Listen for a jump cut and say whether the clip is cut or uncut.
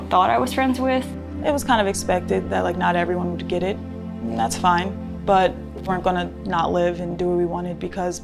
uncut